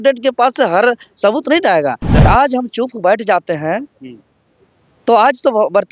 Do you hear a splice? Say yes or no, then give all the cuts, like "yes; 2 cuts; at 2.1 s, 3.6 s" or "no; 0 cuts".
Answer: yes; 1 cut; at 2.2 s